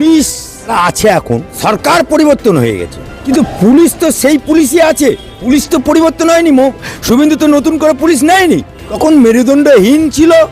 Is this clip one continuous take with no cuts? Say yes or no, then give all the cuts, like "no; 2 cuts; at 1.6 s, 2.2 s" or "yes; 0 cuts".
no; 5 cuts; at 0.7 s, 1.5 s, 3.2 s, 5.3 s, 8.8 s